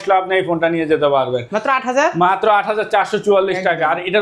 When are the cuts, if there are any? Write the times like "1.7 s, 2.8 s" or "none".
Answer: none

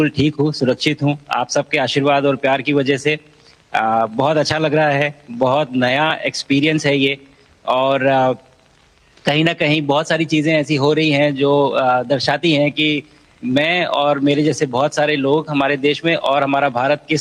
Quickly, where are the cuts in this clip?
none

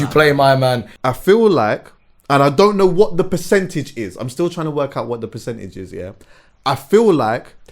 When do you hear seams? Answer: 0.9 s

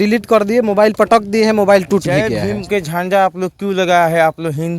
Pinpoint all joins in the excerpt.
2.4 s

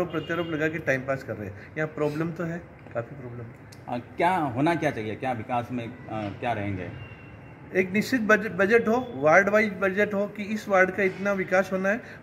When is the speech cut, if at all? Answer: none

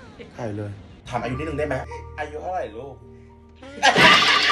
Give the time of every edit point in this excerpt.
0.9 s

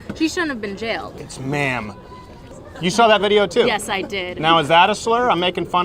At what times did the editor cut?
1.1 s, 2.5 s

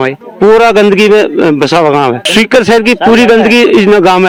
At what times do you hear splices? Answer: none

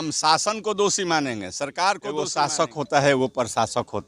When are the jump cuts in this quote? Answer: 2.3 s

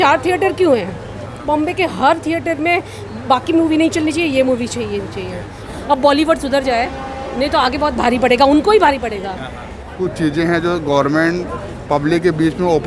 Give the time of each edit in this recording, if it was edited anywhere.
1.4 s, 5.5 s, 9.9 s

